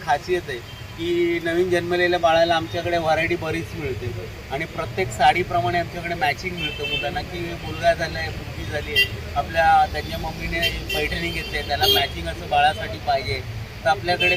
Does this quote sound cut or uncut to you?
uncut